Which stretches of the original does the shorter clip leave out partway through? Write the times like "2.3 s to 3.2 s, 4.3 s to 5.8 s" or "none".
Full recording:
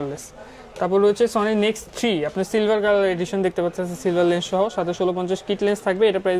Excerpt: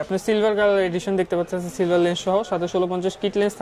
none